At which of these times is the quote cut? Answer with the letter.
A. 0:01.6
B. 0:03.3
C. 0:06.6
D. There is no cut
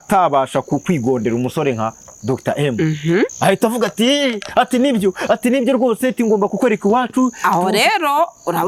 B